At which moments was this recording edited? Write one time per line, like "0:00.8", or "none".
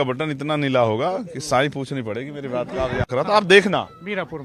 0:03.1